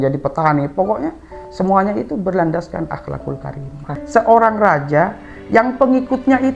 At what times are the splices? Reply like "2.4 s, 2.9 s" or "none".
3.9 s